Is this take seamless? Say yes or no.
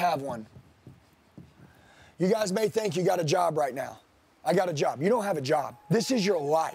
no